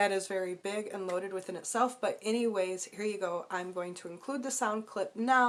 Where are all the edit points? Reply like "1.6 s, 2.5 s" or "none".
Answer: none